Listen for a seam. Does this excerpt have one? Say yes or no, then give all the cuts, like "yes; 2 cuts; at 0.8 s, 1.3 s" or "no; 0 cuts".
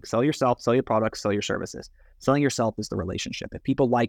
no; 0 cuts